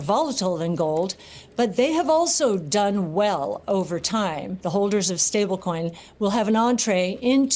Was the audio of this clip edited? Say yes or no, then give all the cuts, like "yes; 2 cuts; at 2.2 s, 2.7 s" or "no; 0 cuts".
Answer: yes; 1 cut; at 4.5 s